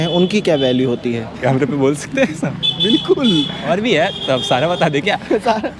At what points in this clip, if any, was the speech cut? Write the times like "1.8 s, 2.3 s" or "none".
1.4 s, 3.6 s